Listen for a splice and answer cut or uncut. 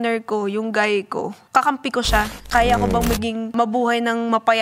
cut